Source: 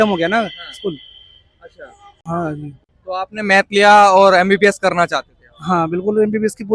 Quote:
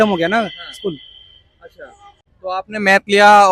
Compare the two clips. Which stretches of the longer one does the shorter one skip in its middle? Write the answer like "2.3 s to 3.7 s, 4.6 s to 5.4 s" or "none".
2.1 s to 2.8 s

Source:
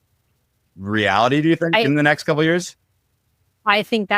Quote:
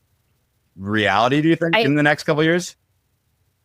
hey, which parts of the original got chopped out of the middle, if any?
none

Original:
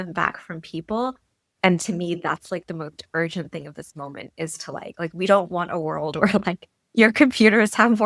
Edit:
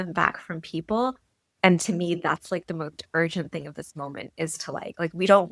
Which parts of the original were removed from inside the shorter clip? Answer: none

